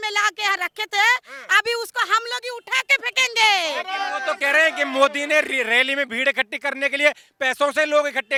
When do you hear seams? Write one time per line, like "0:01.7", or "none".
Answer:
none